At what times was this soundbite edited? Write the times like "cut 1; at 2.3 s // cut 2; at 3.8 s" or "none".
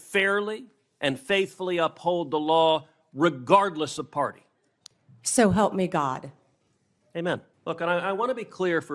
cut 1; at 7.5 s